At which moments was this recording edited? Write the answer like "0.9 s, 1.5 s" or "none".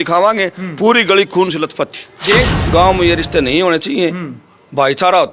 2.6 s